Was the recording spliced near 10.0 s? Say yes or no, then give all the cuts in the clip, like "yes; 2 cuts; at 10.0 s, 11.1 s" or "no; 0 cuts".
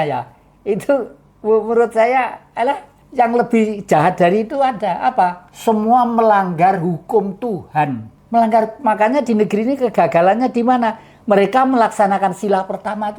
no; 3 cuts; at 3.0 s, 5.5 s, 8.1 s